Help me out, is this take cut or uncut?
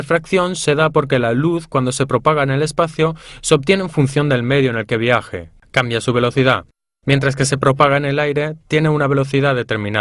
uncut